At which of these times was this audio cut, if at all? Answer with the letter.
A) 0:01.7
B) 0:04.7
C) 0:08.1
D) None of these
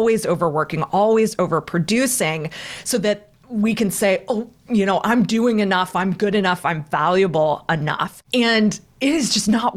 C